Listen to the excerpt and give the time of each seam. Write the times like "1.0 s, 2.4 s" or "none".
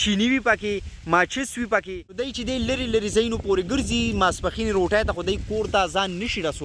2.3 s